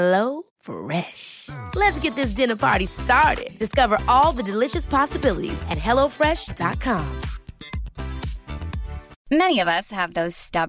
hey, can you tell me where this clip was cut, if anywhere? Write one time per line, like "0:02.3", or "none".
0:09.1

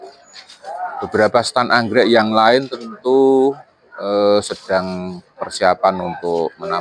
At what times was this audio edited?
none

